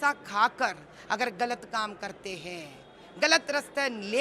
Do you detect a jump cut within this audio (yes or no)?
no